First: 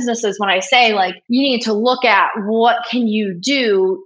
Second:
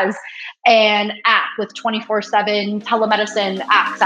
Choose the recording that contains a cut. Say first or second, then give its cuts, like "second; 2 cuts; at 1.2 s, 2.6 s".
first; 1 cut; at 1.2 s